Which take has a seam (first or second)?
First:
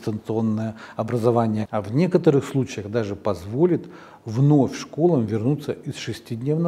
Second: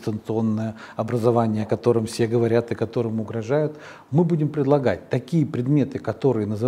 first